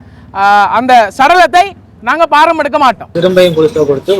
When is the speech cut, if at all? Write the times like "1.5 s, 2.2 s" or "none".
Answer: 3.1 s